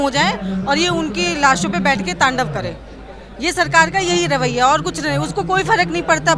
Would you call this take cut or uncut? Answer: uncut